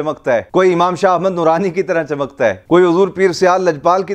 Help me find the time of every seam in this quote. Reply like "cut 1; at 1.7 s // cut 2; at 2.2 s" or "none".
none